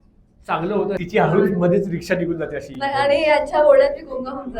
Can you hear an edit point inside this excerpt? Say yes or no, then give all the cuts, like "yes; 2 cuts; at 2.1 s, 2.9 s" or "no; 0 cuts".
yes; 1 cut; at 1.0 s